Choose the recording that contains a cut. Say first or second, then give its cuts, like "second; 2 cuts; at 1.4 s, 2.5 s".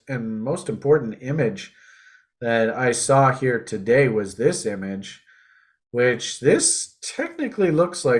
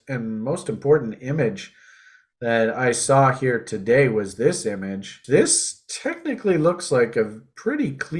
second; 1 cut; at 5.2 s